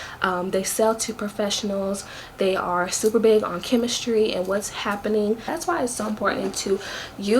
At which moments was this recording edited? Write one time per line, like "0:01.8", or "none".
0:05.5